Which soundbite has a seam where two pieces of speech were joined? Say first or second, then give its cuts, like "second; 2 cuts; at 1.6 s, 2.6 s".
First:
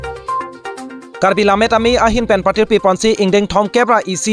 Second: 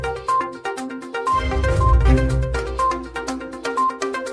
second; 1 cut; at 1.1 s